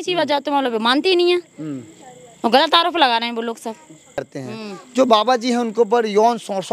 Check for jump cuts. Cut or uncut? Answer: cut